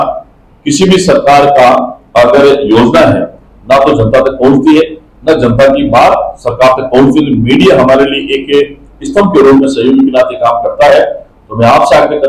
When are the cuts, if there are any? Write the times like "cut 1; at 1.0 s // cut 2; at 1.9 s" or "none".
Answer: none